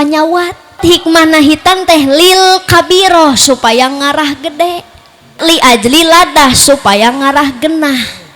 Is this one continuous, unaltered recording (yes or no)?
no